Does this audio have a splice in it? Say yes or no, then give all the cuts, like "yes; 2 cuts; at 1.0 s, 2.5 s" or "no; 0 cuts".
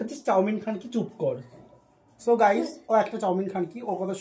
no; 0 cuts